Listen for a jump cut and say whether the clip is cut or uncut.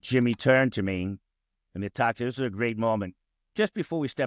uncut